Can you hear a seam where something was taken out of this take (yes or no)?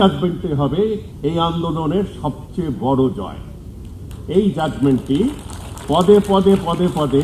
no